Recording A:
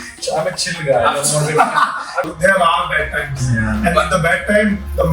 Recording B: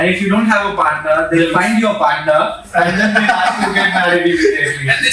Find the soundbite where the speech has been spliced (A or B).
A